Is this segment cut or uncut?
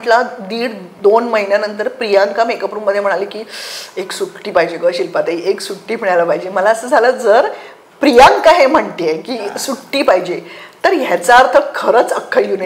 uncut